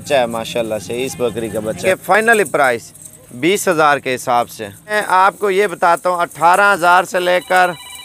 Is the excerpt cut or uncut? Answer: cut